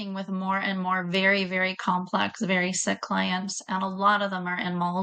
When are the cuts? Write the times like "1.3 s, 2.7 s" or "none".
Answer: none